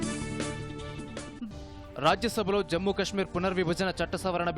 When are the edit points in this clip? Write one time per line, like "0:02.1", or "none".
0:01.2